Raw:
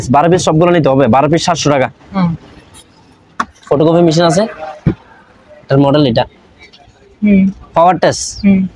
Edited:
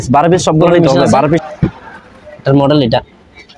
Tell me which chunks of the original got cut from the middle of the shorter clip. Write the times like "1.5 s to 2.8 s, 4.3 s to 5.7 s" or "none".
1.4 s to 4.7 s